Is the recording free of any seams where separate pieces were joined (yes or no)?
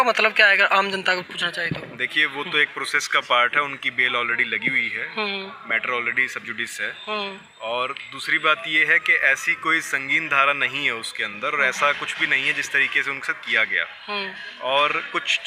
yes